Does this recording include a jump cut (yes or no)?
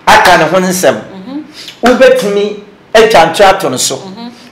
no